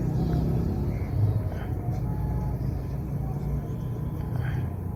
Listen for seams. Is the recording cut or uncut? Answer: uncut